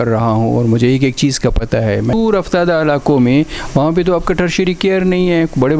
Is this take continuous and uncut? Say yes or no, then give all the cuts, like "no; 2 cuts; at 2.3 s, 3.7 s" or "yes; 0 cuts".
no; 1 cut; at 2.1 s